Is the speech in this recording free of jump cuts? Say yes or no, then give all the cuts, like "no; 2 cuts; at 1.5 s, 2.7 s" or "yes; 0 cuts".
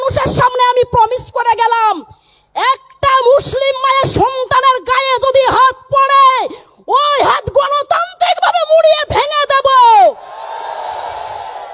yes; 0 cuts